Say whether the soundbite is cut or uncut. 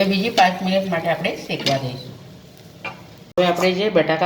cut